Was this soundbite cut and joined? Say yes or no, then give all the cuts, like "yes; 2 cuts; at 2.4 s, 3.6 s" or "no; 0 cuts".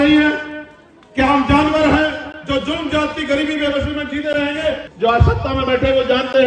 yes; 1 cut; at 4.9 s